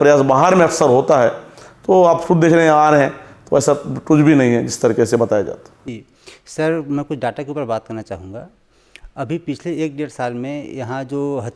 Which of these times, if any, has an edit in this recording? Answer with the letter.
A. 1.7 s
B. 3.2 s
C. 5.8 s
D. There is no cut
C